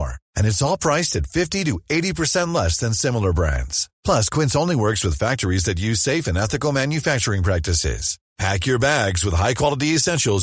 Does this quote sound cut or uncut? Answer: uncut